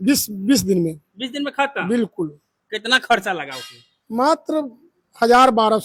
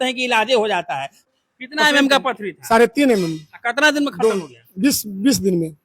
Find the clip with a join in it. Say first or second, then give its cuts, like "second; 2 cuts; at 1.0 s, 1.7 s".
second; 1 cut; at 1.3 s